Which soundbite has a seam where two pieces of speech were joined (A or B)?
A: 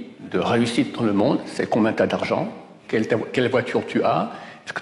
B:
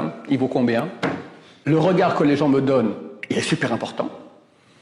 B